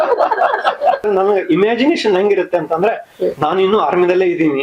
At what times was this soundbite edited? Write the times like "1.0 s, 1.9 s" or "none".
1.1 s